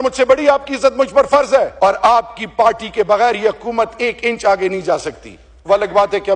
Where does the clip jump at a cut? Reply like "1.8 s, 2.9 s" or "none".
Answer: 1.7 s